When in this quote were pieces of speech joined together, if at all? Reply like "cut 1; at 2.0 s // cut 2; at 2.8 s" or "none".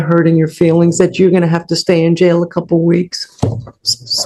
none